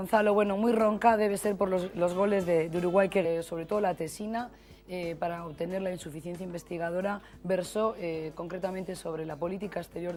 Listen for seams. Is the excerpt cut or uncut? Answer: uncut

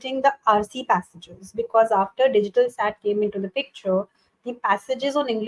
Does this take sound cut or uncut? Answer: uncut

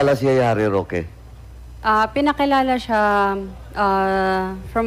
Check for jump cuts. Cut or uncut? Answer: uncut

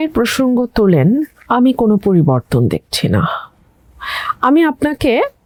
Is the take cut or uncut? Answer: uncut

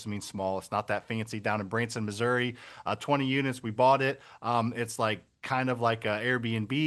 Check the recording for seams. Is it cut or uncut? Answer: uncut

